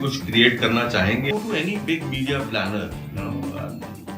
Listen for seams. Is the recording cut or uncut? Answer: cut